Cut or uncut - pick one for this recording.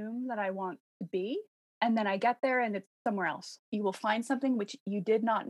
cut